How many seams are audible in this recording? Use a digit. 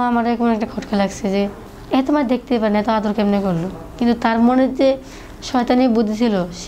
1